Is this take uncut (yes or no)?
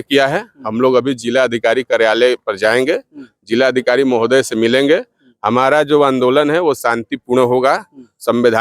yes